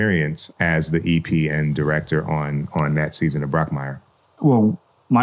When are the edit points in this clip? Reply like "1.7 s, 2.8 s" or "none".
4.3 s